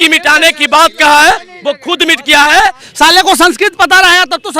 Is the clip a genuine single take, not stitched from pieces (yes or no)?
no